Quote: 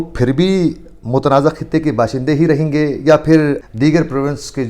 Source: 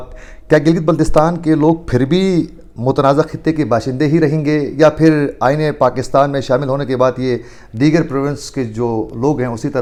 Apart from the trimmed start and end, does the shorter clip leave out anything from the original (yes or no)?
yes